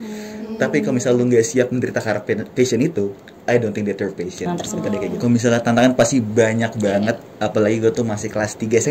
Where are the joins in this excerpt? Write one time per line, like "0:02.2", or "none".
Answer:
0:05.2